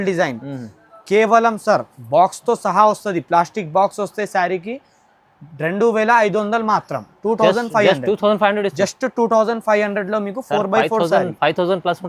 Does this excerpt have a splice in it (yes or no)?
no